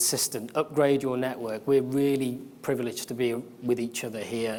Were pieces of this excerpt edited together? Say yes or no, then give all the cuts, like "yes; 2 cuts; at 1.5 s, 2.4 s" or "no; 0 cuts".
no; 0 cuts